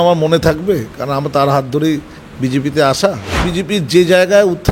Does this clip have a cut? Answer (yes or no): yes